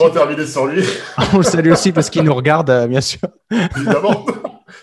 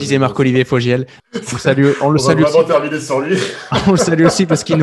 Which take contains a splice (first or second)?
second